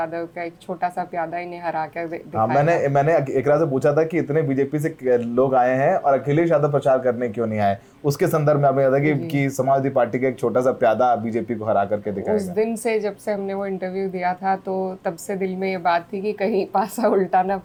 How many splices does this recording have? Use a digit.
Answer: 0